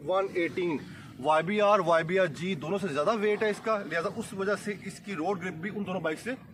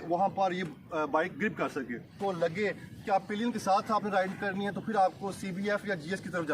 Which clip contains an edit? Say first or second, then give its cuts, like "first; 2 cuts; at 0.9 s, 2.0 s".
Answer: second; 1 cut; at 2.2 s